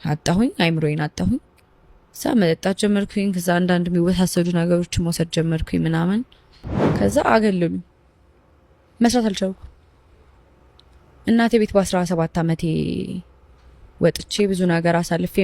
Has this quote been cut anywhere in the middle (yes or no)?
yes